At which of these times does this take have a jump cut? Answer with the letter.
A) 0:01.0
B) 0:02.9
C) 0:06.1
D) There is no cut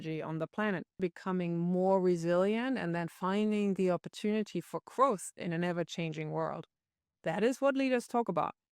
A